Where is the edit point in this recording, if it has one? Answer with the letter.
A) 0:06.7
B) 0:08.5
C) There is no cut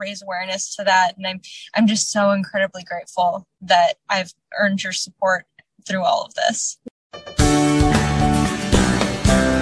A